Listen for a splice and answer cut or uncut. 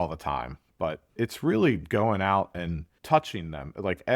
cut